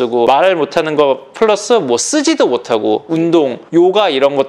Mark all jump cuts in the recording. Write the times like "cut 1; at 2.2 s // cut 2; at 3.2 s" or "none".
none